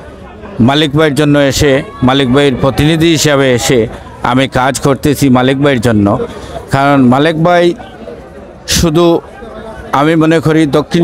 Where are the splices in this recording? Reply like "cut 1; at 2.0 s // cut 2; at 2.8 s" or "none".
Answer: none